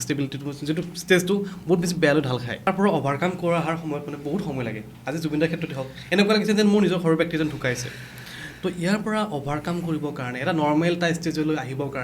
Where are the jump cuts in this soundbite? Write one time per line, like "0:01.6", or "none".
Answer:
0:02.7